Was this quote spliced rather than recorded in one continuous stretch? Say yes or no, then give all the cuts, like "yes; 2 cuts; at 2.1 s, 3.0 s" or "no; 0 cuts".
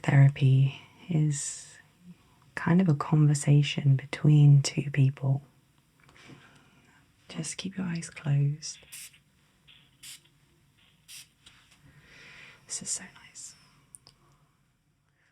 yes; 1 cut; at 6.2 s